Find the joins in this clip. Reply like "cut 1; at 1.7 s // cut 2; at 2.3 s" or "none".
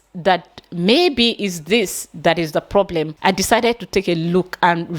cut 1; at 3.1 s

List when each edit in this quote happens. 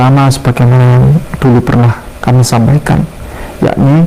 none

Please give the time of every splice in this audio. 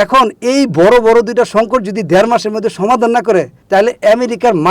none

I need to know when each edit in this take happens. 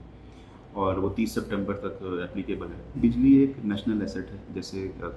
cut 1; at 3.0 s

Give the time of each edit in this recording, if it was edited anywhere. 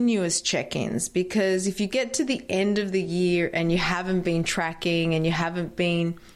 none

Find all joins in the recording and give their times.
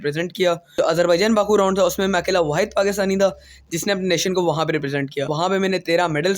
cut 1; at 0.8 s // cut 2; at 5.3 s

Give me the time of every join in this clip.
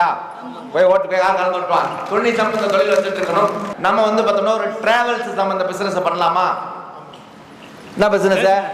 cut 1; at 3.7 s

